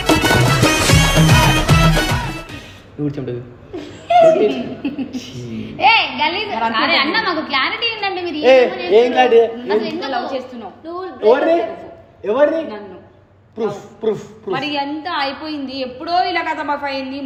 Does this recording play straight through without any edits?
yes; 0 cuts

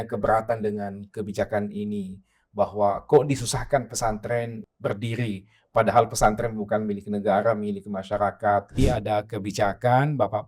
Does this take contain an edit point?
yes; 2 cuts; at 4.6 s, 8.8 s

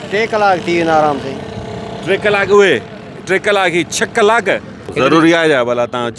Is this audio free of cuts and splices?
no; 1 cut; at 4.8 s

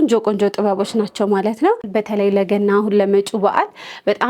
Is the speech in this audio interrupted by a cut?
yes; 1 cut; at 1.9 s

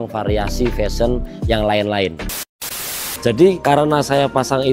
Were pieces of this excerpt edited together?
yes; 1 cut; at 2.6 s

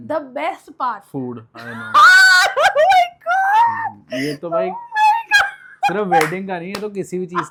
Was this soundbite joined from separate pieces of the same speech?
no; 0 cuts

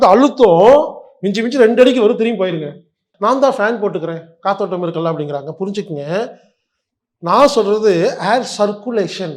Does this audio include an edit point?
yes; 1 cut; at 3.0 s

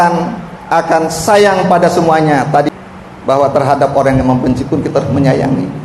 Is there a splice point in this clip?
yes; 1 cut; at 2.7 s

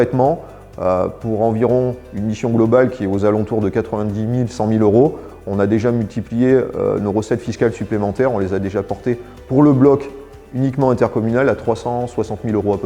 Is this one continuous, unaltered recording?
yes; 0 cuts

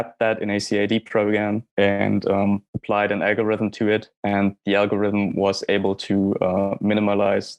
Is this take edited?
no; 0 cuts

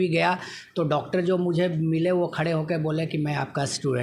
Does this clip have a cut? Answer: no; 0 cuts

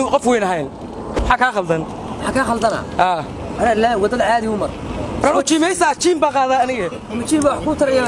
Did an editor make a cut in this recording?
yes; 1 cut; at 1.2 s

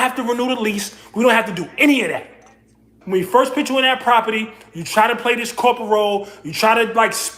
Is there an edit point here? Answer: yes; 1 cut; at 2.9 s

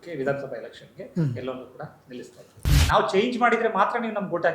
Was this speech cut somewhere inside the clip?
yes; 1 cut; at 2.7 s

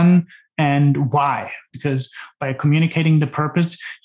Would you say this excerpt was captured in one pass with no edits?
no; 1 cut; at 1.6 s

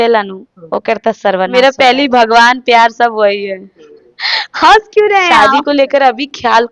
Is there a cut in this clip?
yes; 2 cuts; at 1.5 s, 5.3 s

